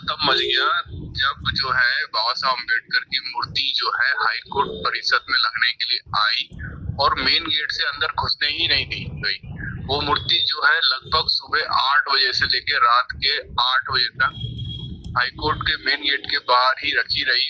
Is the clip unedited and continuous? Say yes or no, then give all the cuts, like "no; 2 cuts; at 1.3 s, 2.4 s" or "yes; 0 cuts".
yes; 0 cuts